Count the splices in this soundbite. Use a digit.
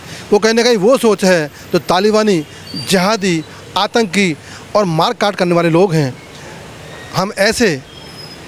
0